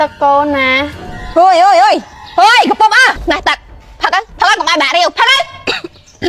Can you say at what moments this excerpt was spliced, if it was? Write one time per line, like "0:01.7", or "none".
0:03.2